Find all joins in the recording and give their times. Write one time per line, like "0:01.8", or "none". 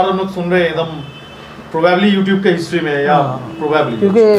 none

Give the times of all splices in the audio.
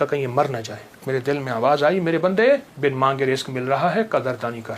0:01.0
0:02.7

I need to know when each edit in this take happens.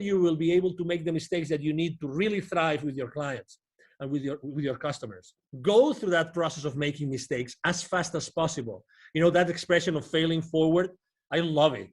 0:05.5

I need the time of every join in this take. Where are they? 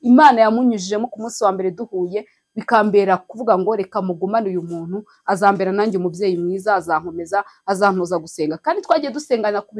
none

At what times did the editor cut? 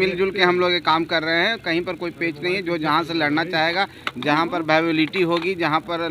none

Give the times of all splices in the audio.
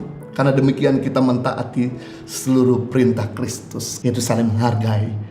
0:03.9

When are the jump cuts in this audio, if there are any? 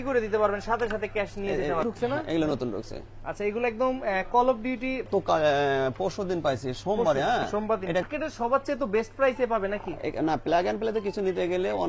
0:01.8
0:05.1
0:08.0

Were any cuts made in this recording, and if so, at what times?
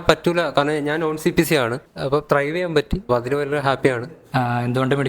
0:01.9
0:03.0
0:04.1

